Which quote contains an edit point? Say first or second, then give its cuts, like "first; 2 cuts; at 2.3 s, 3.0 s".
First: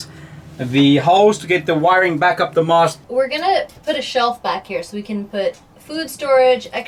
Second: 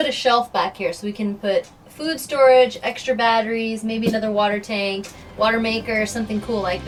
first; 1 cut; at 3.0 s